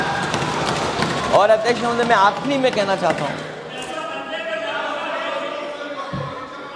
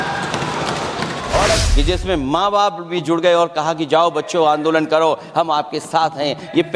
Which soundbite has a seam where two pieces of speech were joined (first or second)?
second